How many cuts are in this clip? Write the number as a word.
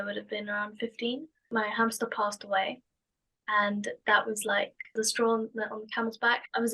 two